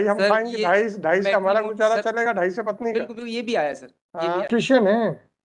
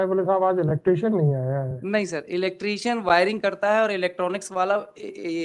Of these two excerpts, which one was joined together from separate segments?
first; 1 cut; at 4.5 s

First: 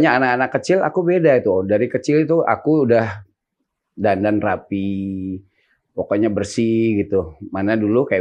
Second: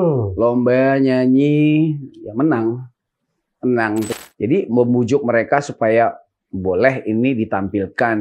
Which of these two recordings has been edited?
second; 1 cut; at 4.2 s

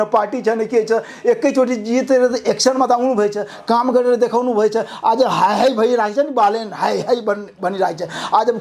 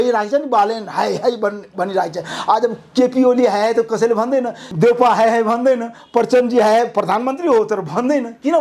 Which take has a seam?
second; 1 cut; at 4.6 s

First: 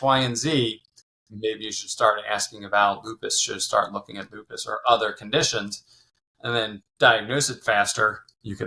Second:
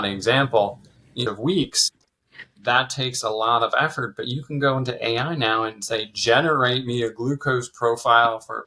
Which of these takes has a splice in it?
second; 1 cut; at 1.2 s

